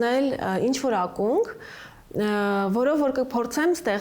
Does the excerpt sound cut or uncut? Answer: uncut